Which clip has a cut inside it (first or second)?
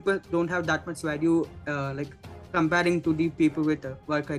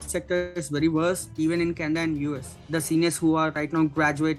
second